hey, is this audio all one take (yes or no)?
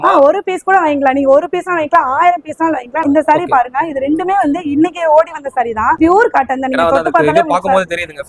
no